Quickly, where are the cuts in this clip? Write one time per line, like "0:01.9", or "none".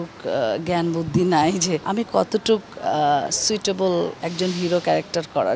0:01.8
0:04.2